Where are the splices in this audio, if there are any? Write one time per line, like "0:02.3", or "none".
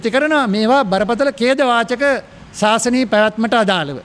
none